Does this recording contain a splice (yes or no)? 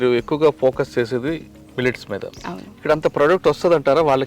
no